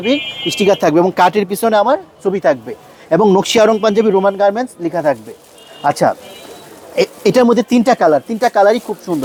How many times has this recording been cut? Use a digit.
0